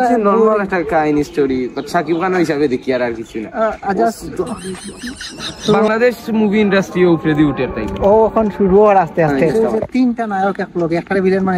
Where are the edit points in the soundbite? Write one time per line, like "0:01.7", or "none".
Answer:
0:05.9
0:09.4

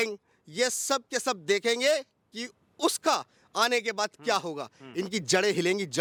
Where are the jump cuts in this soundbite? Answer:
none

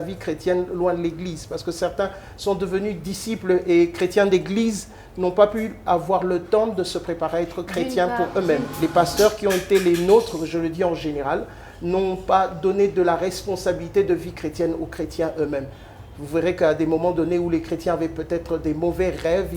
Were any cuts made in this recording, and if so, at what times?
0:08.7

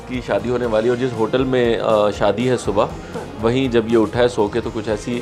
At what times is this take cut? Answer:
none

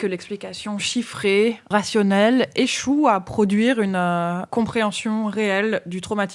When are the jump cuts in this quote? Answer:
0:01.7
0:04.5

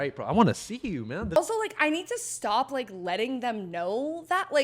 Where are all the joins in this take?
0:01.4

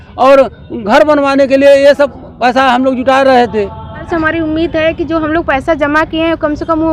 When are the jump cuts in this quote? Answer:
0:04.1

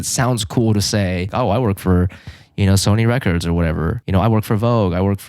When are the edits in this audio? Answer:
0:01.3
0:04.0

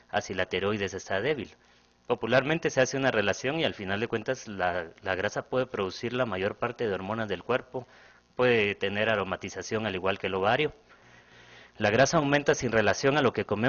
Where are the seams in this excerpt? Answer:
0:11.6

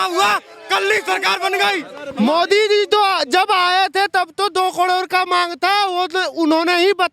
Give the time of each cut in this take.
0:02.0

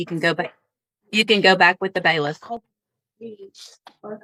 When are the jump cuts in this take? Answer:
none

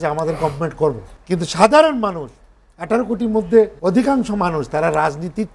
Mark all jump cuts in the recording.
0:01.1
0:03.8

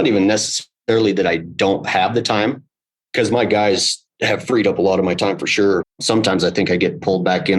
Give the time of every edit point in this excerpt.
0:06.0

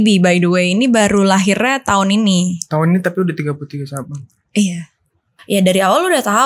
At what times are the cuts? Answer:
0:05.3

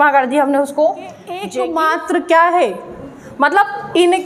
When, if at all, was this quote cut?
0:01.5

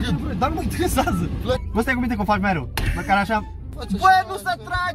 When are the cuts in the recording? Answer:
0:01.6
0:03.7

